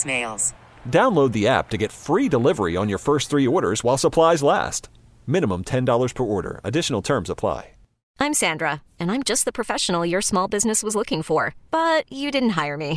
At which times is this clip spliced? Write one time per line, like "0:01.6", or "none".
0:08.1